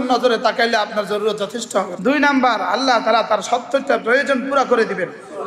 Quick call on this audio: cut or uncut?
cut